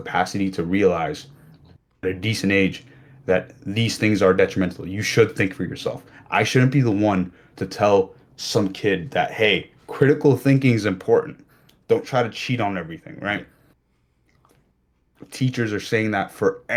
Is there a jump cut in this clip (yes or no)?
no